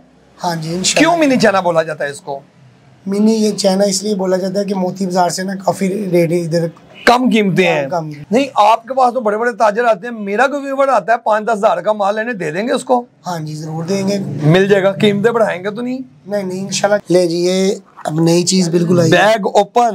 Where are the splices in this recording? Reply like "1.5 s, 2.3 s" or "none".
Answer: 8.1 s, 17.0 s